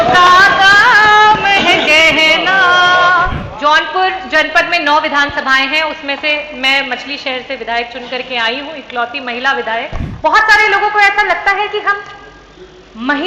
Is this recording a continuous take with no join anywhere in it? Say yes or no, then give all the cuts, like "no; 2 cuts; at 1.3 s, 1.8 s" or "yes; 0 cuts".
no; 2 cuts; at 3.4 s, 10.0 s